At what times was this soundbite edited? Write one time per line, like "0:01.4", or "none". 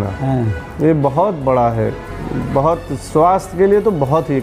none